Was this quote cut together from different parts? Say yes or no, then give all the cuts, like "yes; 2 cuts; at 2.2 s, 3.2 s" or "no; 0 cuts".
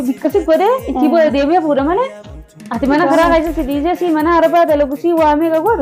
no; 0 cuts